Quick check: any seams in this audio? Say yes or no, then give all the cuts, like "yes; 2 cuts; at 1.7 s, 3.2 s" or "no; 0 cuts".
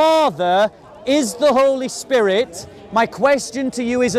no; 0 cuts